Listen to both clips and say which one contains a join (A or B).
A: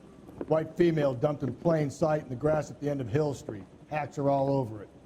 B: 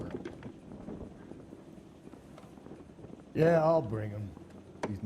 A